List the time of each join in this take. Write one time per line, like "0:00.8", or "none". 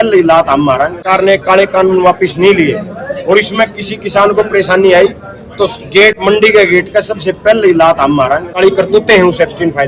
0:01.0
0:08.5

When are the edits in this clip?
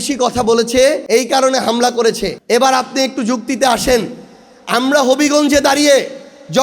0:01.0
0:02.3

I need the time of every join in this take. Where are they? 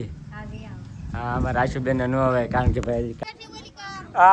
0:03.1

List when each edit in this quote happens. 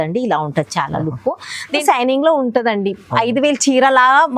0:01.8

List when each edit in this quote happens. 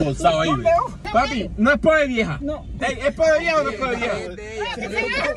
0:01.0

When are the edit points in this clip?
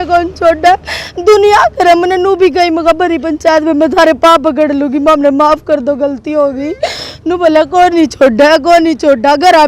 none

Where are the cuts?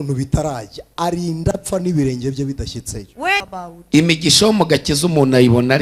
0:03.4

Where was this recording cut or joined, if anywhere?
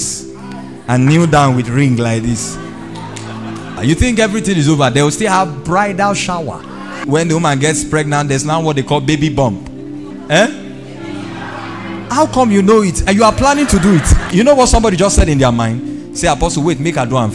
0:03.8
0:07.0
0:10.1
0:14.3

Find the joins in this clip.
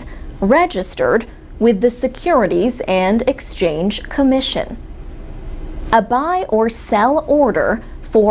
none

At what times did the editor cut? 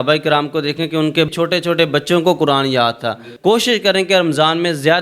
0:01.3
0:03.3

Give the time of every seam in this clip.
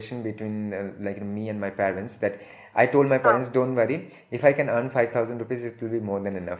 none

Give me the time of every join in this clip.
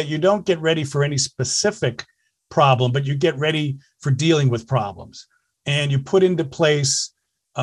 none

